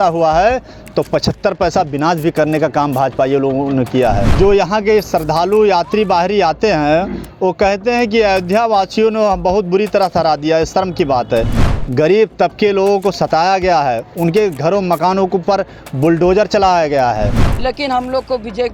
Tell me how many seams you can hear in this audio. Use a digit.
3